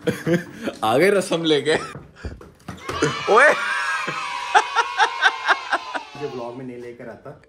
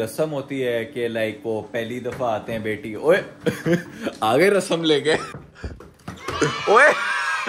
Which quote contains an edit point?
first; 1 cut; at 6.1 s

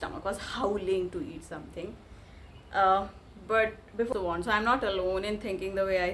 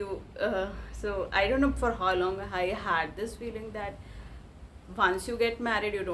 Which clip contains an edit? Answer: first; 1 cut; at 4.1 s

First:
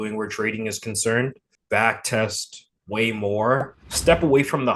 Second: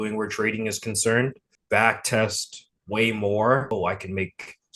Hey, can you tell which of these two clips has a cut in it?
second; 1 cut; at 3.7 s

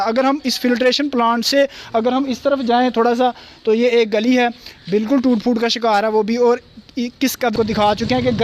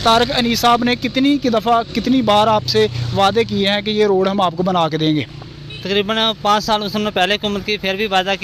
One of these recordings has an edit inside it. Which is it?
first; 1 cut; at 7.5 s

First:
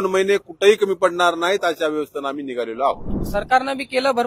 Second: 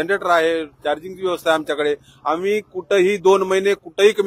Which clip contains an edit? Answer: first; 1 cut; at 3.2 s

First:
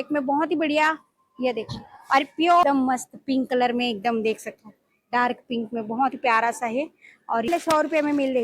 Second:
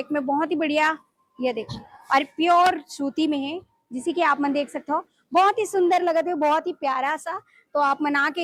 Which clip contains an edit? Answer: first; 2 cuts; at 2.6 s, 7.5 s

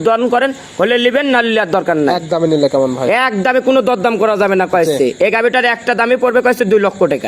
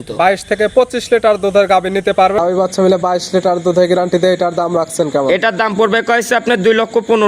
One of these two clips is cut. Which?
second; 1 cut; at 2.4 s

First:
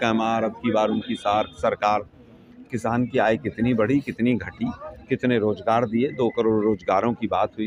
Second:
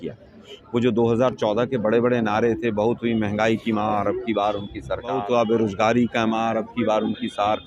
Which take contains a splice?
second; 1 cut; at 5.1 s

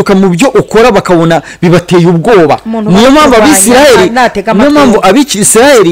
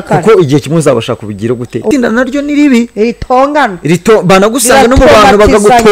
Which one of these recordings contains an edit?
second; 1 cut; at 1.9 s

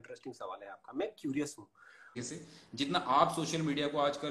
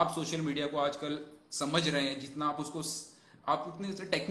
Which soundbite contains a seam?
first; 1 cut; at 2.2 s

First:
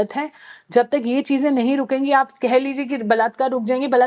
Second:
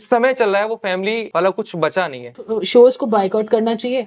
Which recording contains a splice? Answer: second; 2 cuts; at 1.3 s, 2.6 s

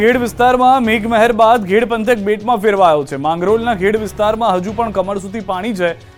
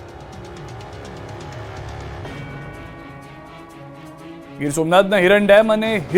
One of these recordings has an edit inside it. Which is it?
second; 1 cut; at 1.3 s

